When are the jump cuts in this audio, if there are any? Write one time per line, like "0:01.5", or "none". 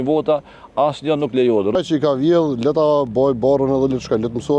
0:01.8

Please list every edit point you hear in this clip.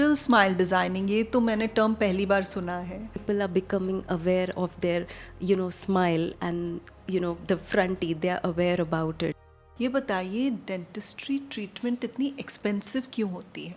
0:03.2
0:09.4

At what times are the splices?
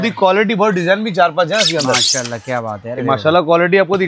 none

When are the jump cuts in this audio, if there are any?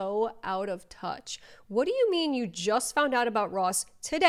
none

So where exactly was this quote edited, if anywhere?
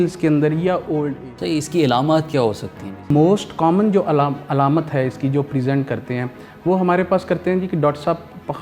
0:01.1
0:03.1

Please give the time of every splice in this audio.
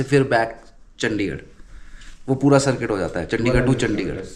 none

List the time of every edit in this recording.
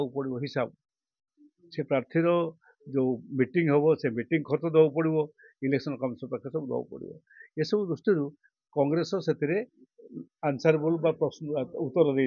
none

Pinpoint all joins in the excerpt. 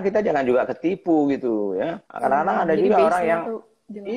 0:02.0

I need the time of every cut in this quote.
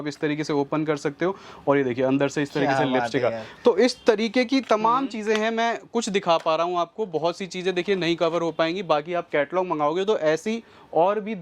none

